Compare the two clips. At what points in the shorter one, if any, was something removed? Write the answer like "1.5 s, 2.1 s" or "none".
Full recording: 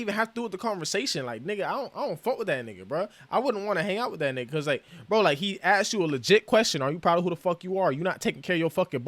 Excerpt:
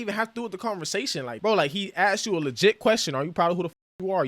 1.3 s